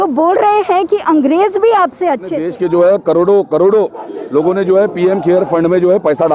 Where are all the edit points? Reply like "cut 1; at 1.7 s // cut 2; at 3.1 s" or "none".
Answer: cut 1; at 2.4 s